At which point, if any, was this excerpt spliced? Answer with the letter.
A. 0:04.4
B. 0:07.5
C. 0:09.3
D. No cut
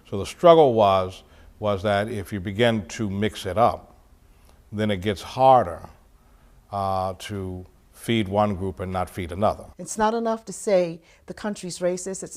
C